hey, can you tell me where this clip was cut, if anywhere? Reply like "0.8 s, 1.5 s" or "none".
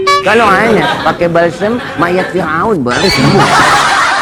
none

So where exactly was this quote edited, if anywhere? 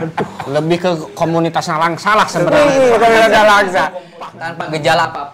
4.0 s

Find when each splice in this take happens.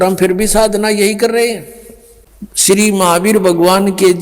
2.7 s

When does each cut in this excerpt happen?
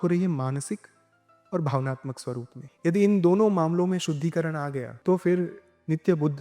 2.6 s, 4.9 s

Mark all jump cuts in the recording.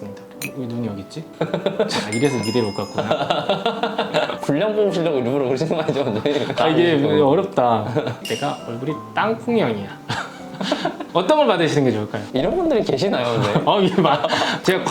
8.2 s, 12.2 s

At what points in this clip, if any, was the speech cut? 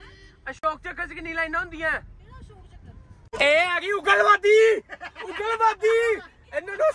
3.3 s

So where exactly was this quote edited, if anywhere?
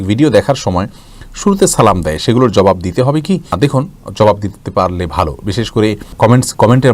none

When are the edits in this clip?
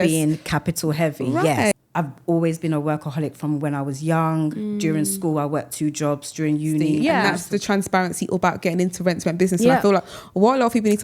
1.7 s, 7.0 s

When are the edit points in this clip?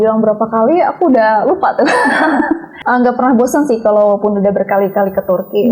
2.7 s

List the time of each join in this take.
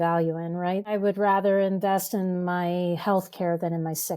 0.9 s

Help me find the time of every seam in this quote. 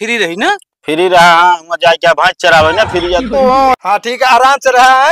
3.8 s

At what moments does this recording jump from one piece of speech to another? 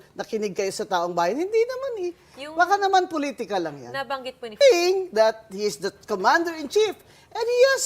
4.6 s

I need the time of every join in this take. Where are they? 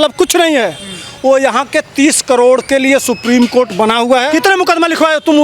4.3 s

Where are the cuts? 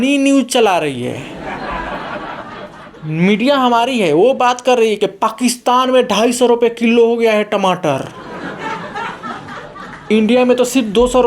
1.3 s, 3.0 s, 8.1 s, 10.0 s

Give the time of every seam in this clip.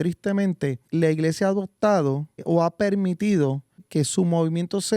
0.8 s, 2.4 s, 3.8 s

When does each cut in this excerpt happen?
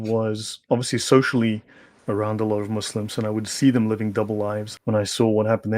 4.7 s

